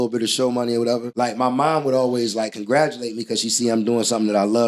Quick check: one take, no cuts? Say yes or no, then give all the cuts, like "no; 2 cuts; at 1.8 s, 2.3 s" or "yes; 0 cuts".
no; 1 cut; at 1.1 s